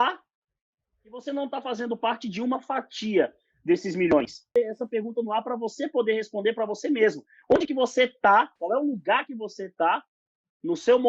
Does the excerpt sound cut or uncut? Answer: cut